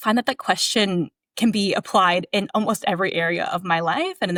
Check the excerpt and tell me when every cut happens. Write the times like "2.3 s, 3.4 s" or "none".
none

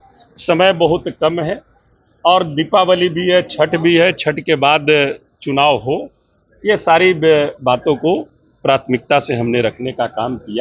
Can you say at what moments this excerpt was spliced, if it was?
none

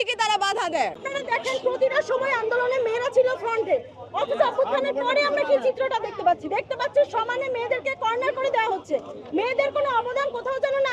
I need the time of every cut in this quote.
none

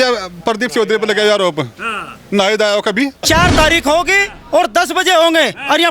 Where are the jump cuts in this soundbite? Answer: 3.2 s

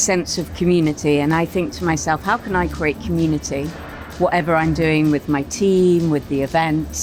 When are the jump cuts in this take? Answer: none

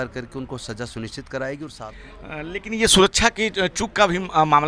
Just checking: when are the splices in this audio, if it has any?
1.9 s

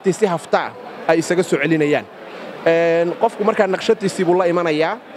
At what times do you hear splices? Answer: none

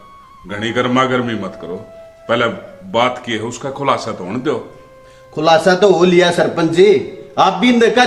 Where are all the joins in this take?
none

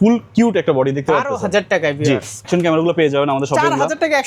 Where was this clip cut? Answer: 2.5 s

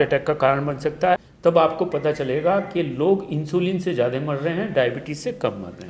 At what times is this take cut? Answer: 1.2 s

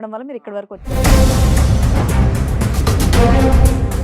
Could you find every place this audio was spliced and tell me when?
0.9 s

